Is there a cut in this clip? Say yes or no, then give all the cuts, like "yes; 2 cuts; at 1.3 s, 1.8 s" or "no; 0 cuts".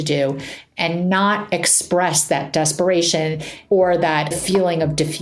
yes; 2 cuts; at 3.5 s, 4.4 s